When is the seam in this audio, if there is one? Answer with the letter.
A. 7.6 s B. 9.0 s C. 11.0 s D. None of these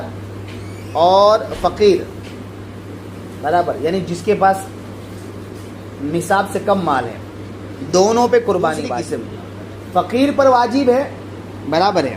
B